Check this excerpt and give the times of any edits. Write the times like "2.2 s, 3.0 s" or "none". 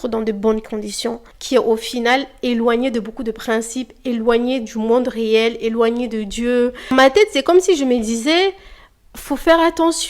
1.3 s, 6.8 s